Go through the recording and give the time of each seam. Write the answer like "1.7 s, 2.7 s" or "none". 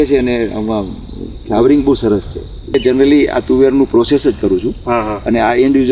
2.7 s

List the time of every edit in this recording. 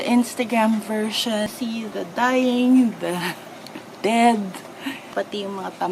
1.5 s

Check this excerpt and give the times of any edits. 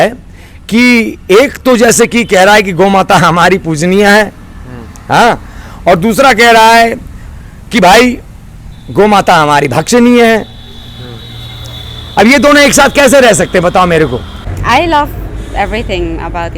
14.6 s

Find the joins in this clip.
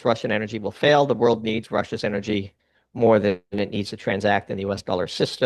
none

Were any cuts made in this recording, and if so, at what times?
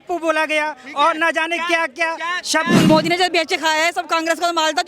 2.9 s

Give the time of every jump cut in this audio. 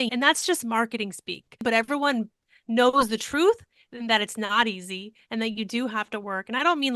1.6 s

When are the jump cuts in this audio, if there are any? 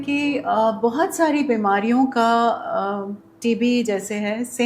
none

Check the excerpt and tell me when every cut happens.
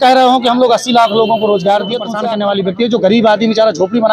2.1 s

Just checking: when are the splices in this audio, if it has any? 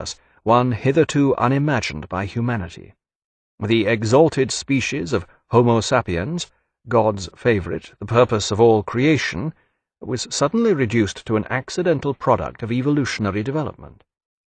12.0 s

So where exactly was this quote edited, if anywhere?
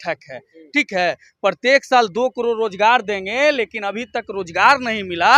none

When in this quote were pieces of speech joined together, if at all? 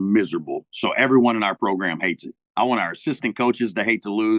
none

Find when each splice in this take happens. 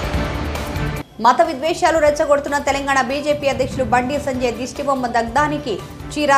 none

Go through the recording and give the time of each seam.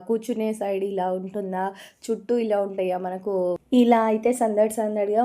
3.6 s

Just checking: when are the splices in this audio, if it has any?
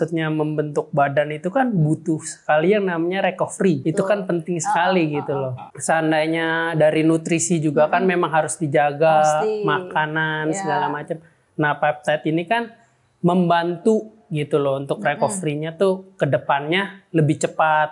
3.8 s, 5.6 s

